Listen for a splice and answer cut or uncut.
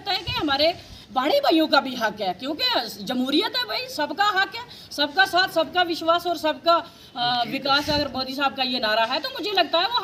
uncut